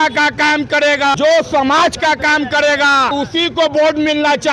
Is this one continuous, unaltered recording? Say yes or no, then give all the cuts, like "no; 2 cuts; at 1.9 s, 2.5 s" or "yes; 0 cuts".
no; 2 cuts; at 1.2 s, 3.1 s